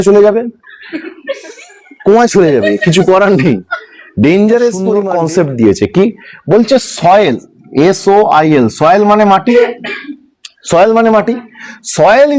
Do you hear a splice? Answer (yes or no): yes